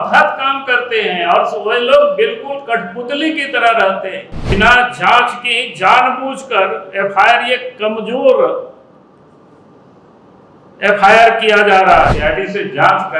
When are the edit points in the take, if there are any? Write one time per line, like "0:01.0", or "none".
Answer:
0:04.4
0:12.2

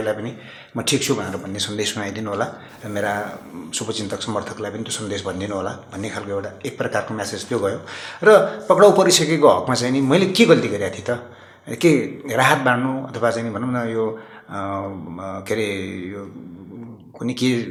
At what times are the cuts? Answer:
none

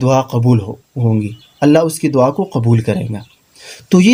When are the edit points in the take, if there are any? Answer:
none

